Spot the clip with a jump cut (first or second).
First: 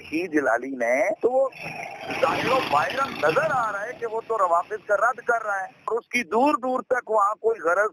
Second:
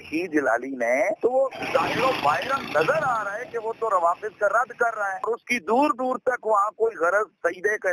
second